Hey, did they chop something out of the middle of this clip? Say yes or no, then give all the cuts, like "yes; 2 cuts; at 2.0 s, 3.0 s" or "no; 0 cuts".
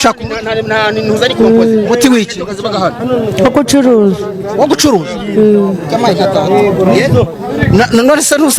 no; 0 cuts